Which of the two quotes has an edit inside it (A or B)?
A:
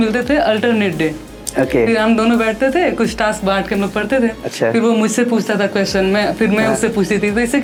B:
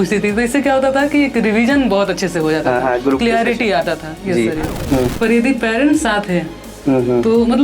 B